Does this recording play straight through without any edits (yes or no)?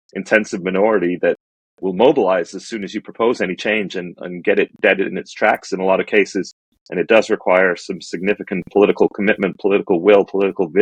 yes